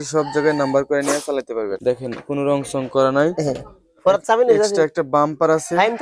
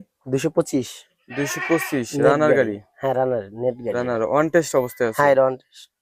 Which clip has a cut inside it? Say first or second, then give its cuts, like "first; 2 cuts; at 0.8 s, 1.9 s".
first; 1 cut; at 1.7 s